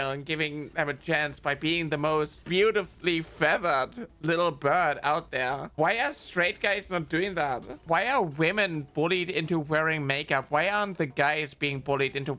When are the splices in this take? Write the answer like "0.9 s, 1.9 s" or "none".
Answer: 2.4 s, 7.8 s